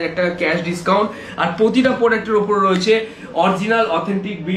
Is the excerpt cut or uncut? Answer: uncut